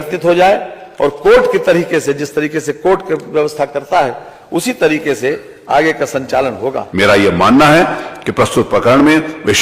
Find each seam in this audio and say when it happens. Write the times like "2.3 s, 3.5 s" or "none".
6.8 s